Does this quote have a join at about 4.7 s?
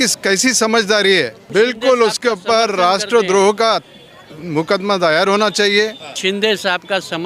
no; 2 cuts; at 1.4 s, 6.2 s

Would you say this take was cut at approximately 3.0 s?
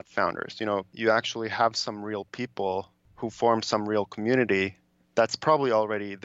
yes; 2 cuts; at 0.9 s, 3.0 s

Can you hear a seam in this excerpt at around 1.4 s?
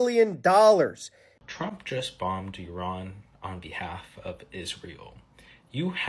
yes; 1 cut; at 1.4 s

